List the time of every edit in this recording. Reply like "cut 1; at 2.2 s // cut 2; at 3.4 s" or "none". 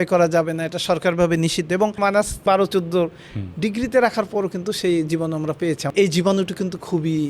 cut 1; at 2.4 s // cut 2; at 5.9 s